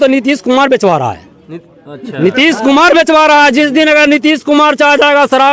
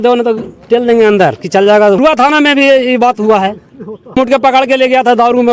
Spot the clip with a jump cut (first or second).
second